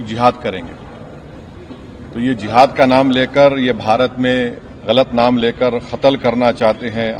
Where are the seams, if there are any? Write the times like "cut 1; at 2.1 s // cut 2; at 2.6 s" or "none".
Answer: none